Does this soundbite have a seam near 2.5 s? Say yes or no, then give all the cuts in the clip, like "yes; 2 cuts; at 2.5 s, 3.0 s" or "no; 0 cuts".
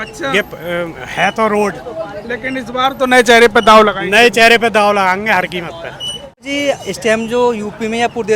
no; 1 cut; at 6.5 s